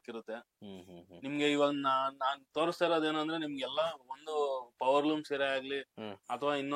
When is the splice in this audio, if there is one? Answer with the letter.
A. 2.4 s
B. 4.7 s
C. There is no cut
C